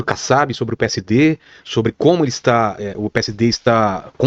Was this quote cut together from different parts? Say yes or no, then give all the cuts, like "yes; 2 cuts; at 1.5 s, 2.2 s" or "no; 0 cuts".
no; 0 cuts